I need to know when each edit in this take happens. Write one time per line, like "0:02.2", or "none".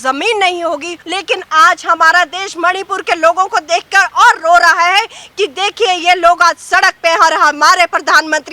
0:01.0